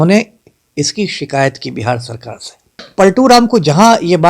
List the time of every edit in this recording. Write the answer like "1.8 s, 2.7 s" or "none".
2.8 s